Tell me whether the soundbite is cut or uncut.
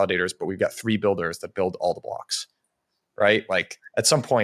uncut